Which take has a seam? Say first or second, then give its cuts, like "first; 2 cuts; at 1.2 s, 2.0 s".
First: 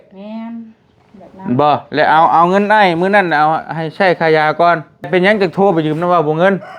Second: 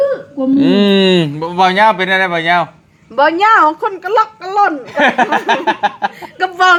first; 1 cut; at 5.1 s